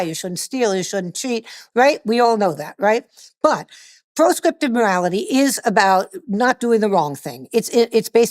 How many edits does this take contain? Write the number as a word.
one